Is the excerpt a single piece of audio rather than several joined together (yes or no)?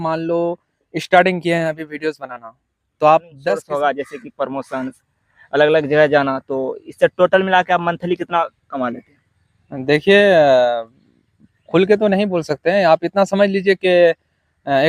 no